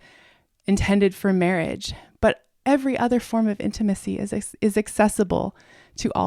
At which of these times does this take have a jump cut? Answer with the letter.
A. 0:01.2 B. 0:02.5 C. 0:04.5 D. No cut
B